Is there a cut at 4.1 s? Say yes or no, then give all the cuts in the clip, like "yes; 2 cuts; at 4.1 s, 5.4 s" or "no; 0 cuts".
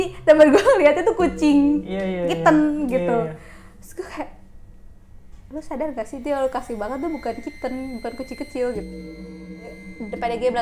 no; 1 cut; at 9.4 s